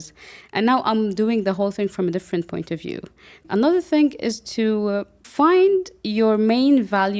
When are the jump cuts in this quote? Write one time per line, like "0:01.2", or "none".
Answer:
0:03.4
0:05.3